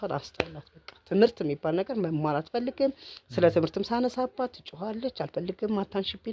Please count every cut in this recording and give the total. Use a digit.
0